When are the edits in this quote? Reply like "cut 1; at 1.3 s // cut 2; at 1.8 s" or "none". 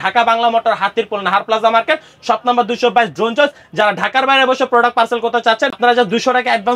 cut 1; at 5.7 s